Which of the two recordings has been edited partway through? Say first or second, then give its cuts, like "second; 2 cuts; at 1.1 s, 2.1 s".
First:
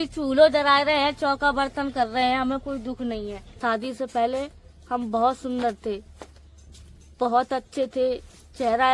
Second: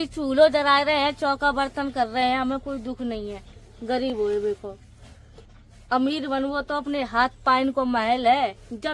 first; 1 cut; at 3.4 s